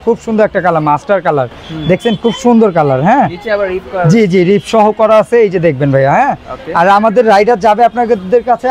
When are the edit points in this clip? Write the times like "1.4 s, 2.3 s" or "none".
none